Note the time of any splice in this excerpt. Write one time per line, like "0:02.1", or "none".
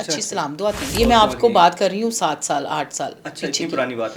0:00.9